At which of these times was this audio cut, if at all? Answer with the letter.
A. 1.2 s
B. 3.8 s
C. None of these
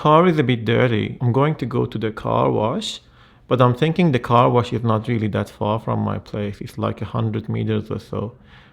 A